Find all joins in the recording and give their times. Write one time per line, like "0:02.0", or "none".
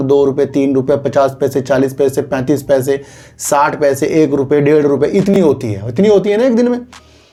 none